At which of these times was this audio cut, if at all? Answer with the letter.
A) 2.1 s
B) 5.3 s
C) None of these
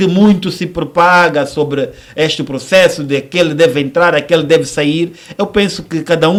C